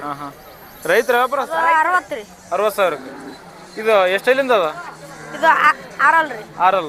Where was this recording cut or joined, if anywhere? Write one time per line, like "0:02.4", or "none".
0:01.5